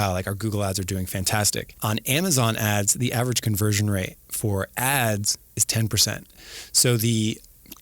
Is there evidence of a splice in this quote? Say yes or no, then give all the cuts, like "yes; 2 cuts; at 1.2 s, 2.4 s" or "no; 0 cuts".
yes; 1 cut; at 1.8 s